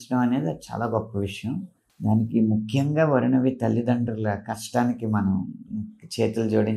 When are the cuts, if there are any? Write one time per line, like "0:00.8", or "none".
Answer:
0:01.9